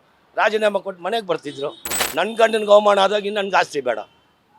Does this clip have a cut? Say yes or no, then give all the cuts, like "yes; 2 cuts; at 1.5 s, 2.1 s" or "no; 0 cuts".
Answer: yes; 1 cut; at 1.9 s